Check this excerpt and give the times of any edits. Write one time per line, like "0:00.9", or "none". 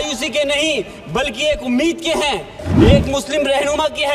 0:02.6